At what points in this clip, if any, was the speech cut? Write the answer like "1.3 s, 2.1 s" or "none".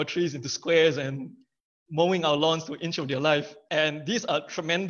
3.6 s